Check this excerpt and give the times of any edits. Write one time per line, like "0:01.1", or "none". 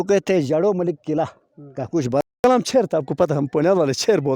0:02.4

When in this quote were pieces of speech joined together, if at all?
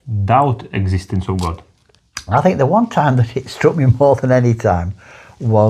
none

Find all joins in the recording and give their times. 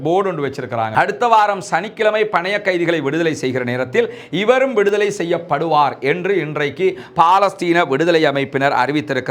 0:00.9

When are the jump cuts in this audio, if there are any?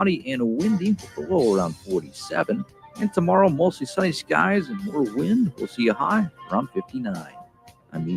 none

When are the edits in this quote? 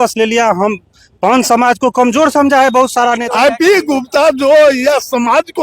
0:03.2

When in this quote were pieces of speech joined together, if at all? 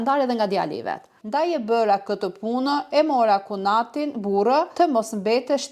0:01.2

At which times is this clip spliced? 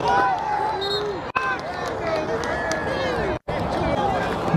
none

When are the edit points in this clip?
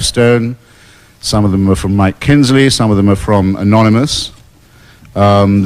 0:02.5

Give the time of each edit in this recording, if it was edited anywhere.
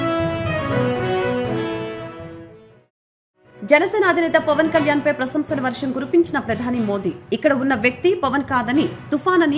0:01.1

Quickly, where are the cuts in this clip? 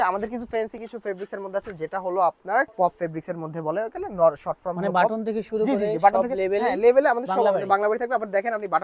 0:02.7

